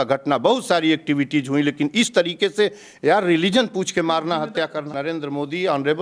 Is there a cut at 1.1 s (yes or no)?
no